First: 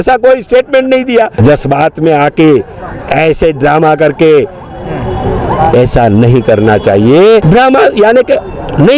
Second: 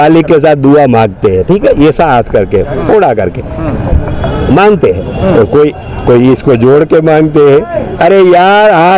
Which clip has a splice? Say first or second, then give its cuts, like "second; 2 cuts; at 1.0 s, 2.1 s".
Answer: first; 2 cuts; at 1.3 s, 7.4 s